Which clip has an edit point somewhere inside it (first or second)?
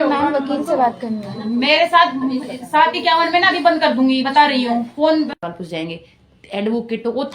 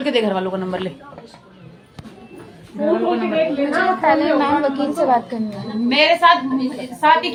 first